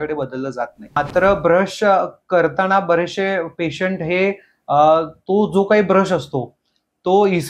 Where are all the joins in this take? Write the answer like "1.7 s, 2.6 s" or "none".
1.0 s